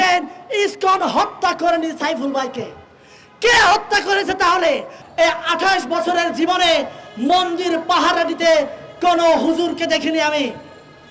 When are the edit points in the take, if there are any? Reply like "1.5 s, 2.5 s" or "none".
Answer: 5.0 s